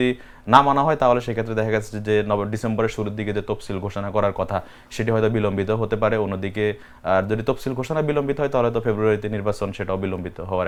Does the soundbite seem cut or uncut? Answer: uncut